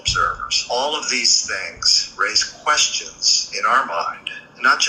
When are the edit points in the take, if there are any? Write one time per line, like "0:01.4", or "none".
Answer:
0:01.4